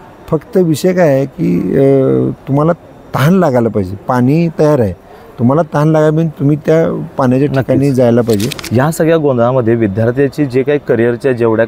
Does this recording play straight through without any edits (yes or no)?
no